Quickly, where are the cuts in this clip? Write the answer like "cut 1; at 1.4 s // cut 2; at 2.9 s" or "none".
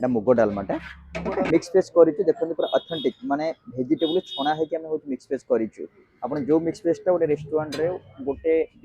cut 1; at 1.5 s